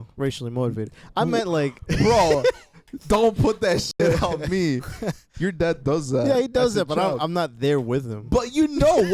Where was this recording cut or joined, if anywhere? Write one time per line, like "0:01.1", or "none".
0:05.3